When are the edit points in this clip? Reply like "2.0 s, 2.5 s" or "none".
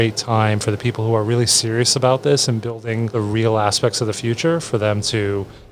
3.1 s